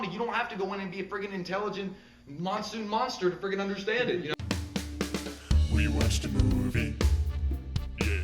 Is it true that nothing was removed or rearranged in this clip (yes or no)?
no